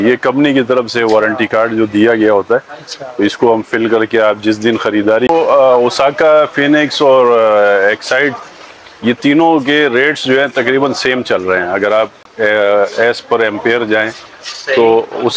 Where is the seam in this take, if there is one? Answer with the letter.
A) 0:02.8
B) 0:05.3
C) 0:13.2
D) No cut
B